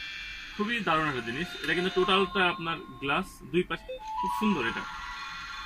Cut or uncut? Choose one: cut